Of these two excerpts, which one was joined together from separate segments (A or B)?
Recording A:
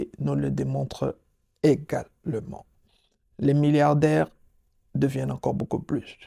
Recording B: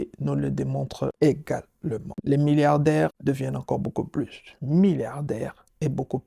B